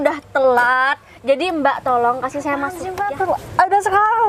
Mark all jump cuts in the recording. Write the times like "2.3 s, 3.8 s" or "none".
2.9 s